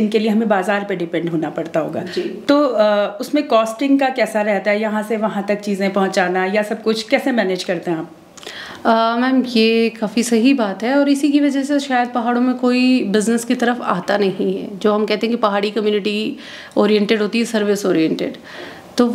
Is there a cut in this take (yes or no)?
no